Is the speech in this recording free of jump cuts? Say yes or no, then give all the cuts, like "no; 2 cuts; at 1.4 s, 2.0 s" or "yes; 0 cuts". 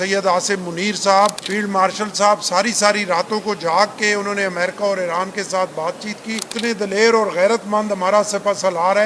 no; 2 cuts; at 1.4 s, 6.5 s